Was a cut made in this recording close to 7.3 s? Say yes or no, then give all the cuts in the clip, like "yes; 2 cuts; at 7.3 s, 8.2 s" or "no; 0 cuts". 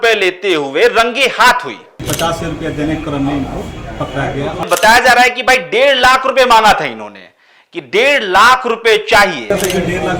no; 3 cuts; at 2.0 s, 4.7 s, 9.5 s